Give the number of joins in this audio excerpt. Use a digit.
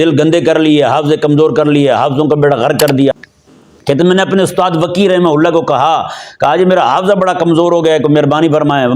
1